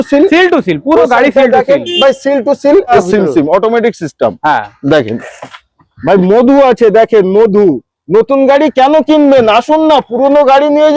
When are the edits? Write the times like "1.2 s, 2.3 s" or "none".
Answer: 3.0 s